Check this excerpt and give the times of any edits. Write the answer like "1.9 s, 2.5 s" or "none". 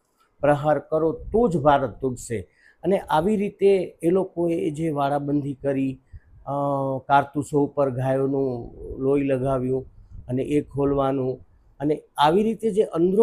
none